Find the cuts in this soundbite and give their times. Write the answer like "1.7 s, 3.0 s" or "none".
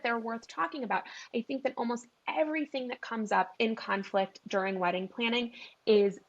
3.5 s